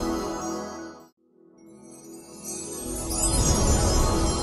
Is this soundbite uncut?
no; 1 cut; at 1.1 s

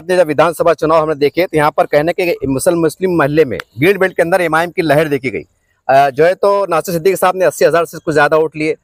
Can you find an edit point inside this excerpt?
no; 0 cuts

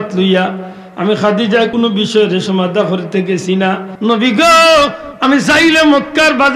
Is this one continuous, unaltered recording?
no; 2 cuts; at 1.7 s, 3.9 s

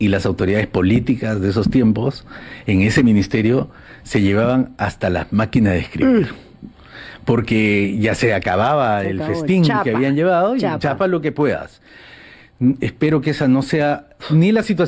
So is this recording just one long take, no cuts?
yes; 0 cuts

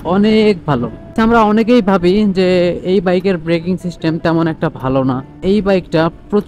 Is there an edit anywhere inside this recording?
yes; 2 cuts; at 1.1 s, 5.4 s

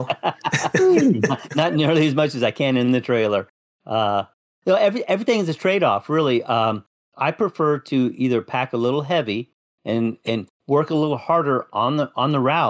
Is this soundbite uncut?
yes; 0 cuts

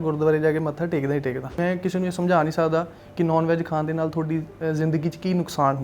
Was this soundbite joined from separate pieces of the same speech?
yes; 1 cut; at 1.5 s

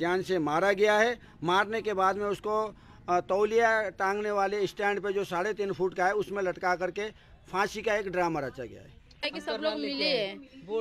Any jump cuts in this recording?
yes; 1 cut; at 9.3 s

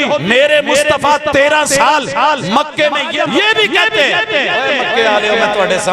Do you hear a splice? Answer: yes; 1 cut; at 3.1 s

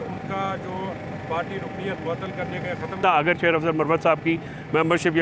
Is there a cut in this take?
yes; 1 cut; at 3.0 s

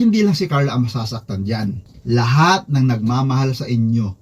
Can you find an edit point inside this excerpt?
no; 0 cuts

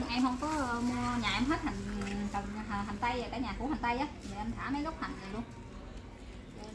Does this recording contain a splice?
no; 0 cuts

